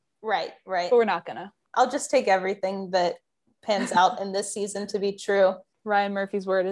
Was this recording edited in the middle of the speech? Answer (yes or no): yes